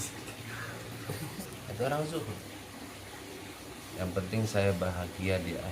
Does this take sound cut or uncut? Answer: cut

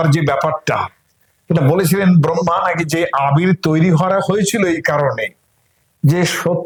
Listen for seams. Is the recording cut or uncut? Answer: uncut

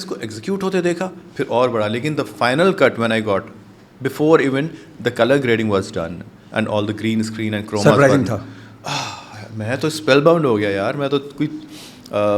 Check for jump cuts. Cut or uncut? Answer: uncut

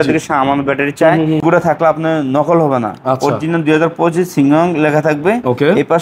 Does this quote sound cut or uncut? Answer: cut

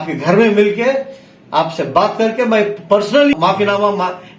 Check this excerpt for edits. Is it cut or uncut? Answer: cut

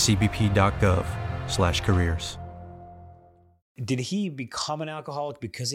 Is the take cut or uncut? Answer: cut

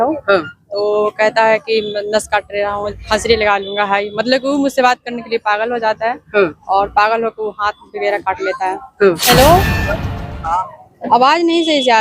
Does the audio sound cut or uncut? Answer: cut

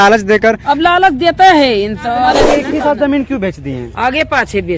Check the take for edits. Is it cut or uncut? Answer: cut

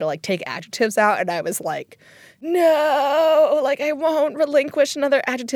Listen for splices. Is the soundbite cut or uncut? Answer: uncut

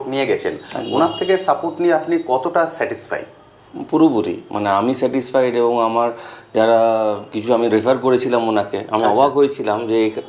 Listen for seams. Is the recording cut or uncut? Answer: uncut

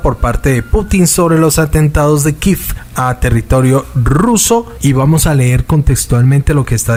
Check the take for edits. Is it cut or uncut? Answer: uncut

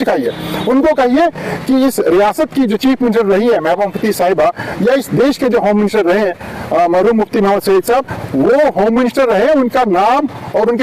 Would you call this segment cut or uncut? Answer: uncut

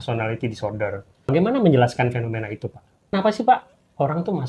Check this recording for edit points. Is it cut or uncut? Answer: cut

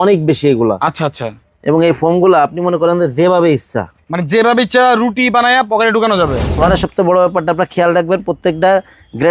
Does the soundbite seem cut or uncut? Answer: cut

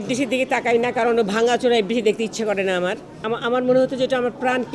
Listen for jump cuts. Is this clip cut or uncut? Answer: cut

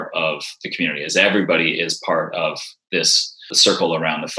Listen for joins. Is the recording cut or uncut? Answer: cut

